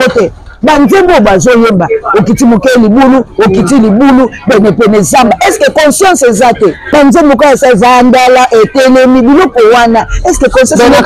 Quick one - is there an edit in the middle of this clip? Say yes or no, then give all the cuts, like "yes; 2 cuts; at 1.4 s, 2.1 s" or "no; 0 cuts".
yes; 1 cut; at 6.8 s